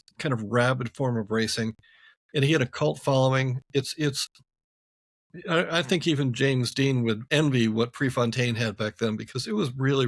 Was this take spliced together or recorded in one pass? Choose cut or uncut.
cut